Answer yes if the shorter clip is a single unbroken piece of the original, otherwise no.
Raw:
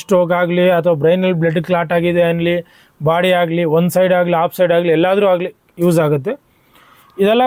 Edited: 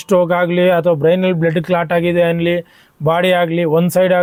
yes